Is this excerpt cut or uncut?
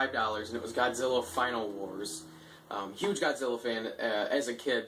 uncut